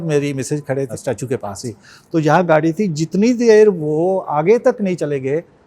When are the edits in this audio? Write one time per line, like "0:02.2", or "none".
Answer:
0:00.9